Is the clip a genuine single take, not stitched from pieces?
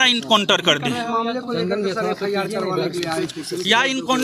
yes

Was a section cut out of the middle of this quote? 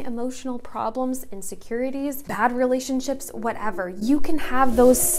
yes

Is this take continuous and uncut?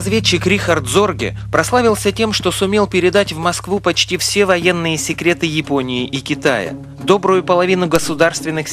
yes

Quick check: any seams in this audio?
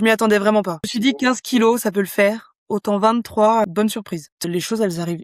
yes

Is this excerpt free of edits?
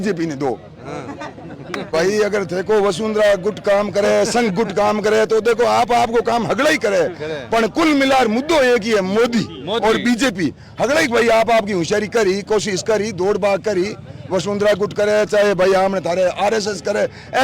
no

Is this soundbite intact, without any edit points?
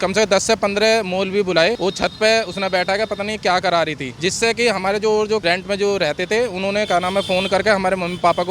yes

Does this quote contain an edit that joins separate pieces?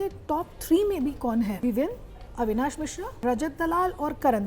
yes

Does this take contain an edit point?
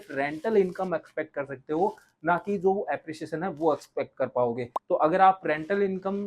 yes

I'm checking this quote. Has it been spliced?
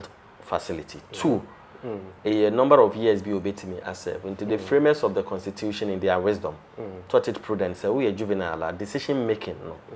no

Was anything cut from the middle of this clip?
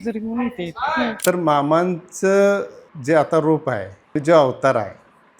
yes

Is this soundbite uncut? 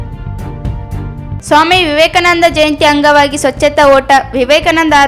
no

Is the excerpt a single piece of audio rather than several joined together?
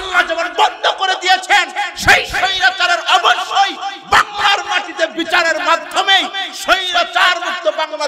yes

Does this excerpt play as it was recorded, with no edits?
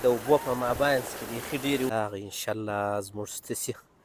no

